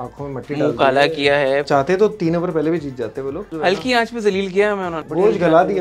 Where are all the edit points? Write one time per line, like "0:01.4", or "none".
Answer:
0:01.7
0:03.5
0:04.9